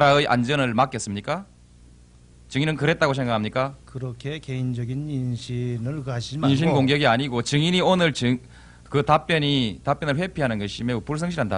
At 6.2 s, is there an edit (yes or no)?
no